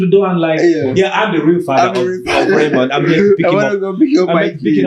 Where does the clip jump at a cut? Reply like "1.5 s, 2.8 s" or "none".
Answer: none